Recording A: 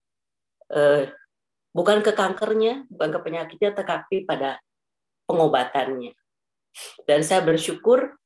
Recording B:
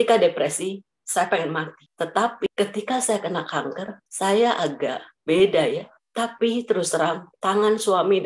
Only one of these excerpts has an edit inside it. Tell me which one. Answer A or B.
B